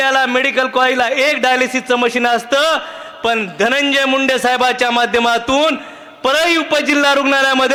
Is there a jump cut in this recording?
no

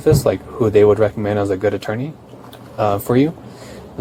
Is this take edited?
no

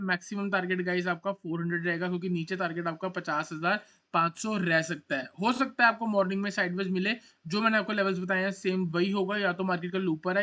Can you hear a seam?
no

